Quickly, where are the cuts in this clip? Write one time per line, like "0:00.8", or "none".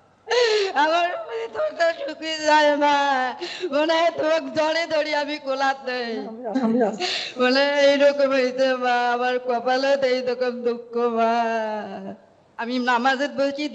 0:12.4